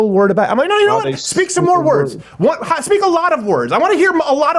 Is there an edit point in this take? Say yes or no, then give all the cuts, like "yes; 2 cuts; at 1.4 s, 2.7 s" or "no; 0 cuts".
no; 0 cuts